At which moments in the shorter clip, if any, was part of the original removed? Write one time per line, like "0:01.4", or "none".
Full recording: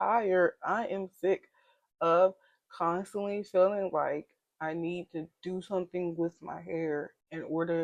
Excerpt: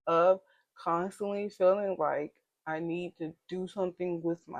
none